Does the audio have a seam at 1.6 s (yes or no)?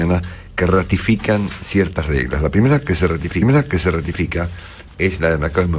no